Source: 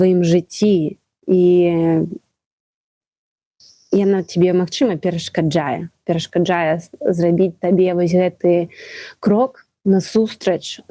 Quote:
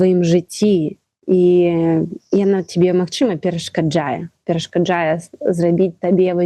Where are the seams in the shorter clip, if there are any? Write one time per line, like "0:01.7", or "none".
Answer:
0:02.2